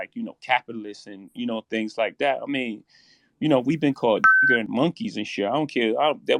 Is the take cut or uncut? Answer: uncut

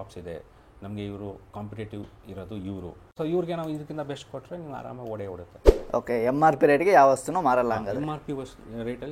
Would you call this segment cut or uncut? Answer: cut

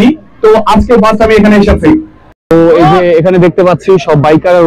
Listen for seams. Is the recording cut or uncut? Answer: cut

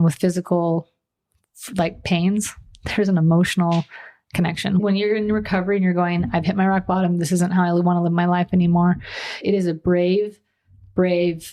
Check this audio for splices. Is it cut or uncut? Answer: cut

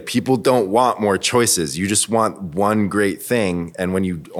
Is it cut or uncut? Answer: uncut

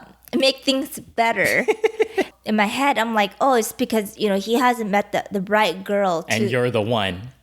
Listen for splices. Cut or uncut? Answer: cut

